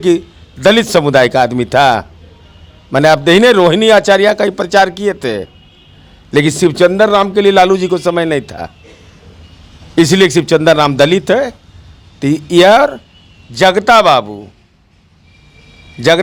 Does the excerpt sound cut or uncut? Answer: uncut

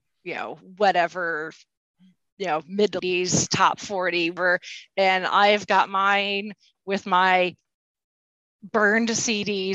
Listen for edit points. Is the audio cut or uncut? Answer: cut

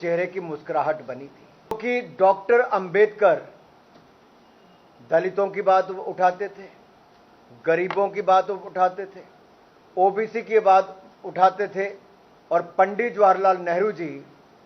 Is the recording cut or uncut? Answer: cut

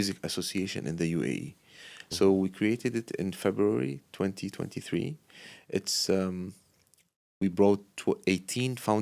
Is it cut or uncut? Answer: uncut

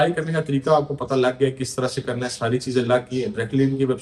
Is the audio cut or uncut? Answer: uncut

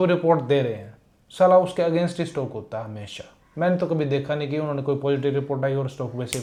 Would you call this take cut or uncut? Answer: uncut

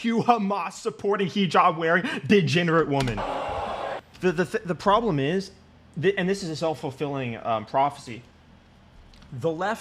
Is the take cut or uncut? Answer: cut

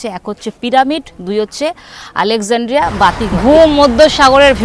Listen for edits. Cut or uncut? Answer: cut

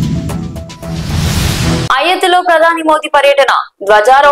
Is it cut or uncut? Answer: cut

